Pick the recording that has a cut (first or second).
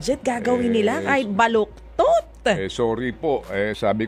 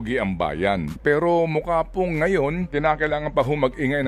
second